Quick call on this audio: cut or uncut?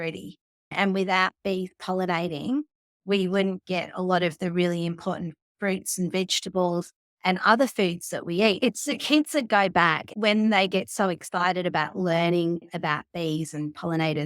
cut